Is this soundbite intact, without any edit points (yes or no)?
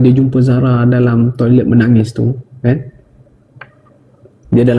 yes